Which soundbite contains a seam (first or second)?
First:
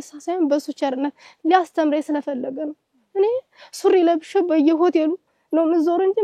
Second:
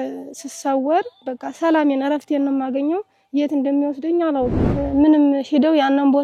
second